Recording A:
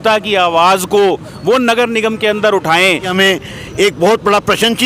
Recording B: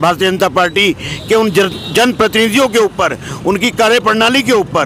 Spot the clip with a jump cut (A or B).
A